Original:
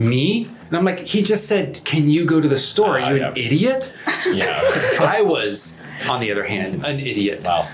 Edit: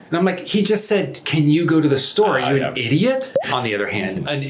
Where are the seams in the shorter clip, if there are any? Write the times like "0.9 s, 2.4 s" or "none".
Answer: 3.3 s